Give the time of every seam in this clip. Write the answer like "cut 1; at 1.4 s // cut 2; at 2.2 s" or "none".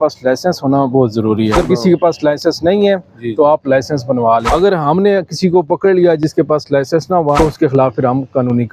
cut 1; at 1.5 s // cut 2; at 4.5 s // cut 3; at 7.4 s